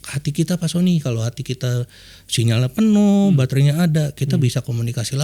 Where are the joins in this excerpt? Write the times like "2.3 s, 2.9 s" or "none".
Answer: none